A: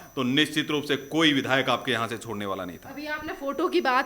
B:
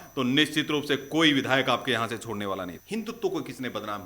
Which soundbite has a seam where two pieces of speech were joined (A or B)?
B